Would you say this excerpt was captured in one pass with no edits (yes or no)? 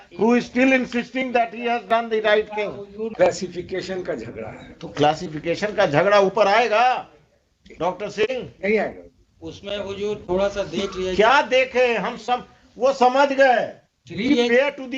no